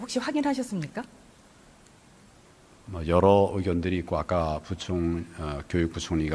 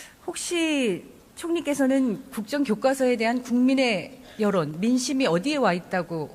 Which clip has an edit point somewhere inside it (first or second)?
second